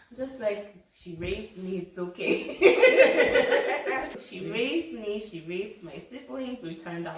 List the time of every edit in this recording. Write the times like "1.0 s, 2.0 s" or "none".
4.2 s